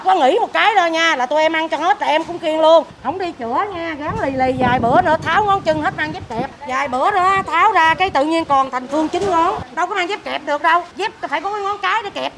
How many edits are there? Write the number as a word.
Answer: four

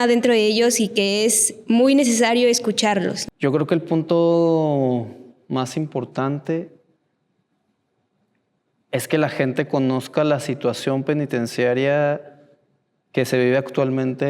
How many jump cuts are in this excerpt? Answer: one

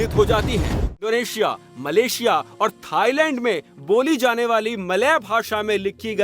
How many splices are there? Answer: one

